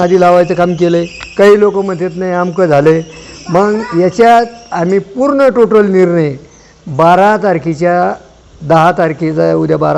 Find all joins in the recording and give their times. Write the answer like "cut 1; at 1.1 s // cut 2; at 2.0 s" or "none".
none